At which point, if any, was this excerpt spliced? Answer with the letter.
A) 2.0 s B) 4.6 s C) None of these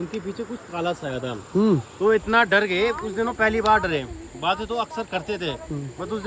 C